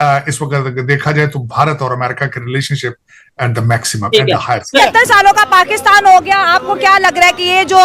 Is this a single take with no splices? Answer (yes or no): no